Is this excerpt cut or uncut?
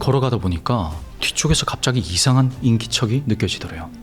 uncut